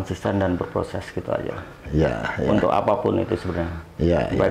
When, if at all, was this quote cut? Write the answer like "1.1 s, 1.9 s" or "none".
none